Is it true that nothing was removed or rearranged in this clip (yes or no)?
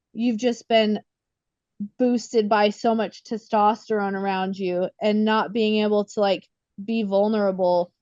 yes